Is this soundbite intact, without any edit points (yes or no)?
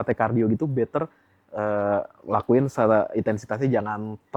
yes